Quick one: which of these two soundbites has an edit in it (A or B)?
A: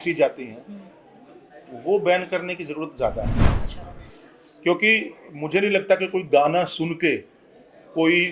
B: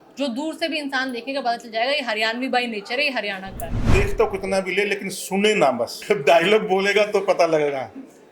B